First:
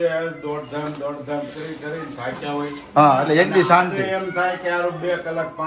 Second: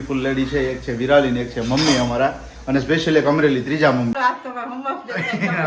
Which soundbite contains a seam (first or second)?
second